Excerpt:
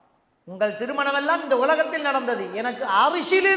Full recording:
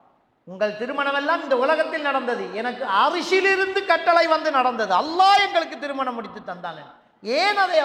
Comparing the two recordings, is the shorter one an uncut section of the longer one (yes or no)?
yes